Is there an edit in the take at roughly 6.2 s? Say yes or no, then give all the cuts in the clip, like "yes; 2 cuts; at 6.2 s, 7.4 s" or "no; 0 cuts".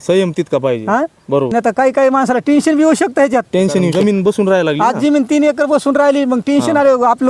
no; 2 cuts; at 1.5 s, 3.9 s